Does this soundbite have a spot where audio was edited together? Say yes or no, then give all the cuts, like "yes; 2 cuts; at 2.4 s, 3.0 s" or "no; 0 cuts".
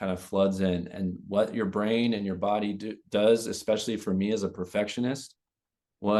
no; 0 cuts